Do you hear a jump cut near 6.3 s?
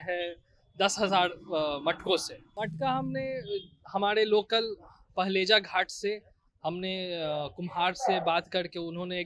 no; 1 cut; at 2.4 s

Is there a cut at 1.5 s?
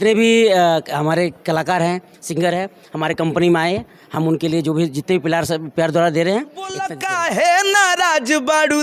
no; 1 cut; at 6.9 s

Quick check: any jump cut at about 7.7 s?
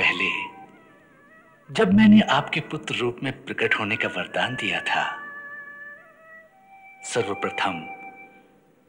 no; 0 cuts

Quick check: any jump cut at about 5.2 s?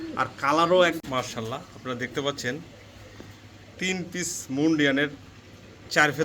no; 1 cut; at 1.0 s

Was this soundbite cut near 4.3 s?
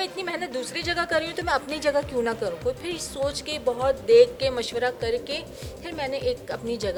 no; 0 cuts

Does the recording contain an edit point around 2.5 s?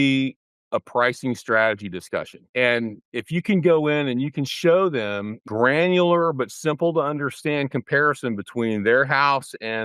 yes; 2 cuts; at 2.5 s, 5.4 s

